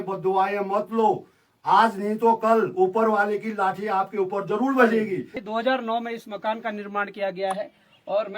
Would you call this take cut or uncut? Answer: cut